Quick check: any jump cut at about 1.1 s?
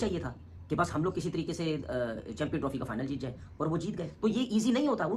no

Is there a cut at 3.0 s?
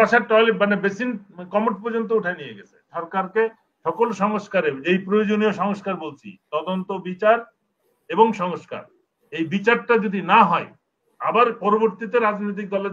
yes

